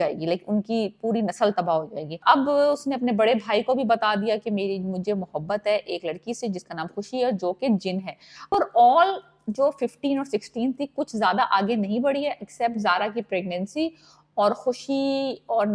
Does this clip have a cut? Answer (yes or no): yes